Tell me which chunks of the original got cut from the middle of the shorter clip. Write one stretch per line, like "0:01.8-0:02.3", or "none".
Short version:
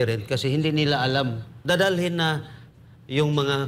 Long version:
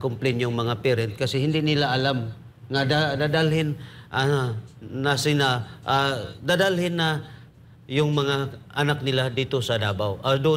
0:02.4-0:06.3